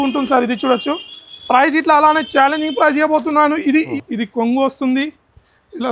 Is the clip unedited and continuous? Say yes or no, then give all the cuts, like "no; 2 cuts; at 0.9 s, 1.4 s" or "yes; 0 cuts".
no; 1 cut; at 3.9 s